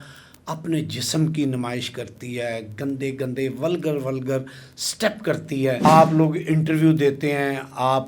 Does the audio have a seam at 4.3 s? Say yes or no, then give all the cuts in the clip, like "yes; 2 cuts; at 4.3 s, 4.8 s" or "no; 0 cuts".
no; 1 cut; at 5.8 s